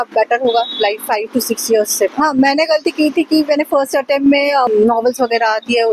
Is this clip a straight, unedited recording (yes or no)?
no